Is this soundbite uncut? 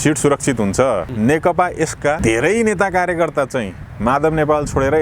no; 2 cuts; at 1.1 s, 2.2 s

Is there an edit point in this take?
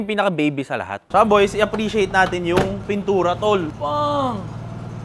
yes; 2 cuts; at 1.0 s, 3.7 s

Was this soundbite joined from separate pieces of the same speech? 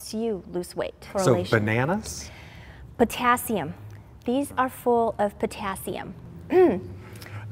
yes; 1 cut; at 1.1 s

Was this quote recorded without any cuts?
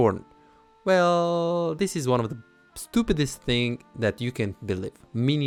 yes; 0 cuts

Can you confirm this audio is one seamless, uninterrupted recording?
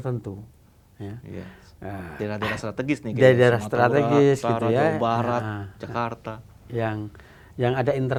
yes; 0 cuts

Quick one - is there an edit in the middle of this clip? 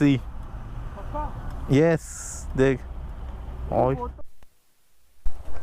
yes; 1 cut; at 4.2 s

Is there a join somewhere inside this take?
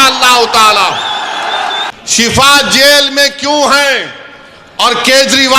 yes; 1 cut; at 1.9 s

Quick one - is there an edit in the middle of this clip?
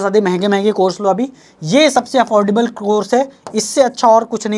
no; 0 cuts

